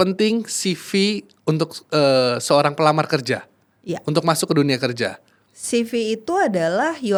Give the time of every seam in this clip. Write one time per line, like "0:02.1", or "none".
none